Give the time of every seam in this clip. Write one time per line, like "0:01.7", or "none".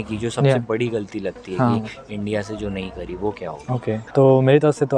0:04.0